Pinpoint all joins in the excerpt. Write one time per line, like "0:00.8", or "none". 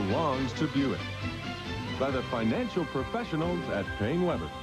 0:02.7